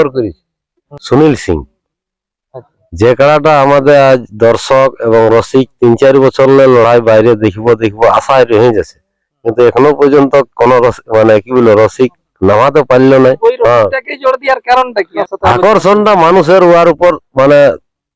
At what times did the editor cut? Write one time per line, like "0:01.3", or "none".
0:00.9
0:13.4
0:15.2